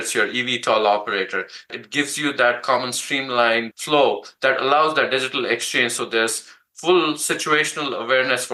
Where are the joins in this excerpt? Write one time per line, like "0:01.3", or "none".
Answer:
0:01.8
0:03.8